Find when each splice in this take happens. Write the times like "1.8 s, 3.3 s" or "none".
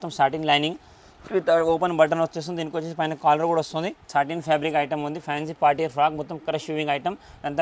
4.1 s